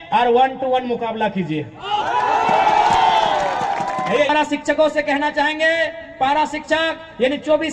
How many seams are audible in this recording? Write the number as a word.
one